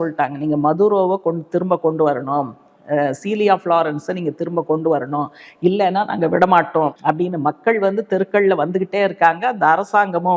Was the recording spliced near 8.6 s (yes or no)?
no